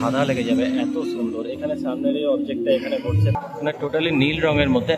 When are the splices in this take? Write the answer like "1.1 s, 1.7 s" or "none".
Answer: 3.3 s